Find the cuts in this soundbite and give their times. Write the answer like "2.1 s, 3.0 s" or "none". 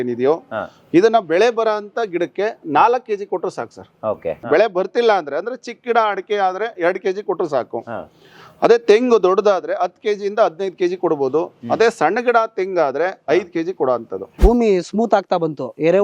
4.4 s, 14.3 s